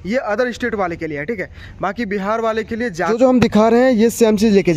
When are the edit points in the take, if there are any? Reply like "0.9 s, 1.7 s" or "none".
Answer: 3.1 s